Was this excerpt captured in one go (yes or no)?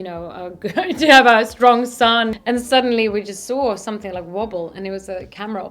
no